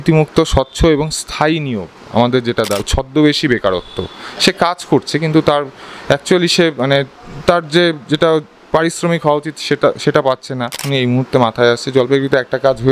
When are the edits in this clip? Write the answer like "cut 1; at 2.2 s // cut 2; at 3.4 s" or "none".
cut 1; at 2.8 s // cut 2; at 10.8 s